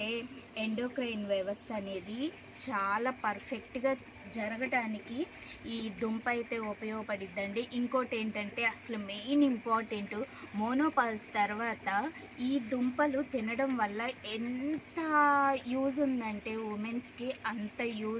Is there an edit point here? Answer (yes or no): no